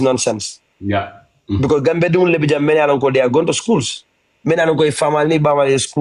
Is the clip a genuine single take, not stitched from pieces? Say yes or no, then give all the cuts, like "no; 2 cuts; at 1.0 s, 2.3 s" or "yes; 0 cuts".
yes; 0 cuts